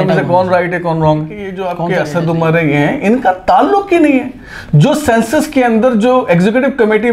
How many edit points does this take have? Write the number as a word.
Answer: one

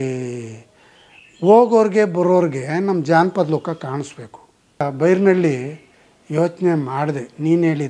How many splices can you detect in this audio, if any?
one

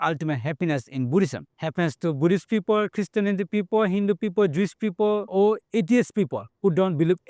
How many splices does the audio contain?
two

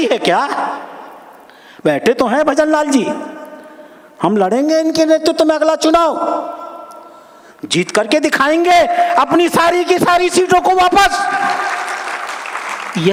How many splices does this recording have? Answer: zero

